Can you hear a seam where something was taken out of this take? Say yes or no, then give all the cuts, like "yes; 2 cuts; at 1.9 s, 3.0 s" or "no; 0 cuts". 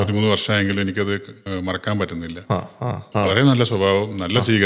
yes; 1 cut; at 3.1 s